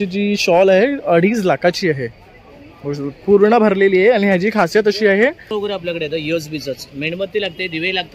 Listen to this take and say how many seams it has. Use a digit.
1